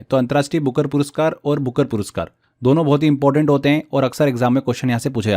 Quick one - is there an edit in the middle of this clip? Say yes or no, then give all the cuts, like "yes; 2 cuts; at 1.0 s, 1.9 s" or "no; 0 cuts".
no; 0 cuts